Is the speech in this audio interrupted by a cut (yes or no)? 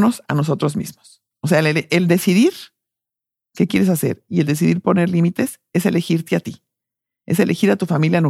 no